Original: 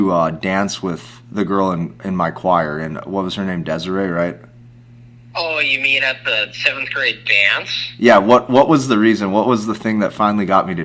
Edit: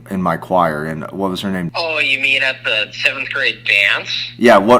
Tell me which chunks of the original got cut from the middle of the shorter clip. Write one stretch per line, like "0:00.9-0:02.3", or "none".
0:03.6-0:05.3